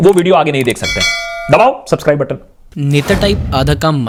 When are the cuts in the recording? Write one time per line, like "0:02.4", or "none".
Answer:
none